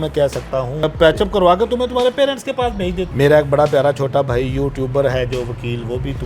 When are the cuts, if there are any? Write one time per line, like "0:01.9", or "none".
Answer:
0:00.8
0:03.0